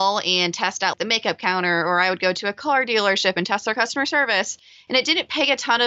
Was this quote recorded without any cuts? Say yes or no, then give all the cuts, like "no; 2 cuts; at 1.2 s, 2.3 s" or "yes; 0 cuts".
no; 1 cut; at 0.9 s